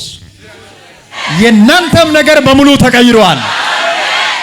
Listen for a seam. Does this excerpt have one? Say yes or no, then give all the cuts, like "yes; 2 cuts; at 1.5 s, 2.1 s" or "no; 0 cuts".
yes; 1 cut; at 1.2 s